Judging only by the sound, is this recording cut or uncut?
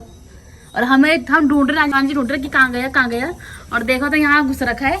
cut